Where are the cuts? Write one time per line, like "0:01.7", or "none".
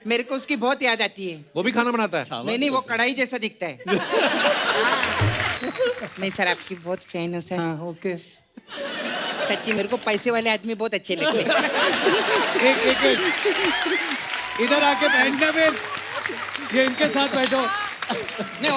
0:05.6